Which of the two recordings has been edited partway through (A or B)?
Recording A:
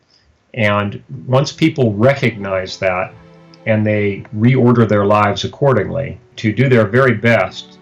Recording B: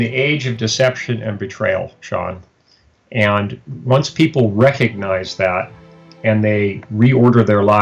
A